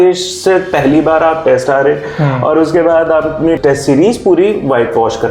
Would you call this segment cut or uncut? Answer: uncut